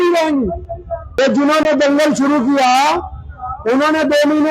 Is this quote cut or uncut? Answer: cut